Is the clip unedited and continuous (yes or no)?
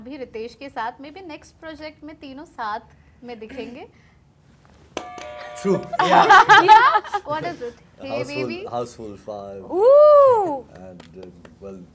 yes